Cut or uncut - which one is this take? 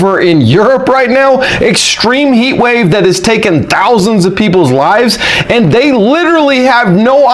uncut